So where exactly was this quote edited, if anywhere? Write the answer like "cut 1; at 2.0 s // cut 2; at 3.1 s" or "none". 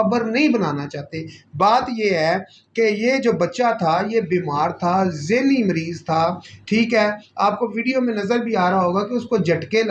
none